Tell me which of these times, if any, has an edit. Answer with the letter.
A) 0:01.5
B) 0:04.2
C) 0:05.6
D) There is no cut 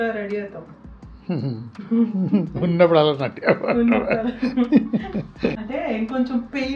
C